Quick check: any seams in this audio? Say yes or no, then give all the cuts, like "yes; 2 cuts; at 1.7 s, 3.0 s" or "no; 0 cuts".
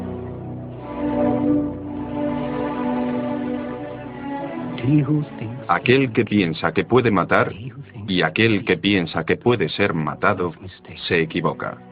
no; 0 cuts